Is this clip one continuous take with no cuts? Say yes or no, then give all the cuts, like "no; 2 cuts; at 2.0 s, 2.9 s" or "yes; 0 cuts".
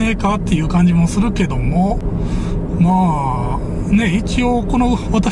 yes; 0 cuts